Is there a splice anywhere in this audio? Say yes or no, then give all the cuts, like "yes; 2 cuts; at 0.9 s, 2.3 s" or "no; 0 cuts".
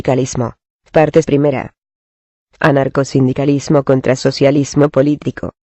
yes; 1 cut; at 3.3 s